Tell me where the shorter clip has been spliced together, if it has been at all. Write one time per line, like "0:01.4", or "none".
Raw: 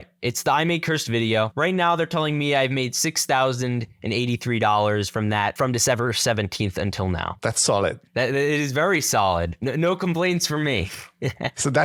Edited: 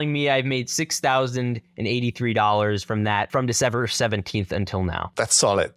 none